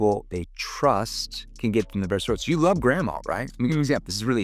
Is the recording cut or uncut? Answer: uncut